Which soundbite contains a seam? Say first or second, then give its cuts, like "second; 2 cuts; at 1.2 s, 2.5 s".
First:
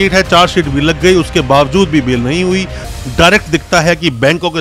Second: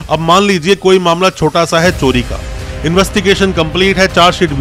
first; 1 cut; at 2.8 s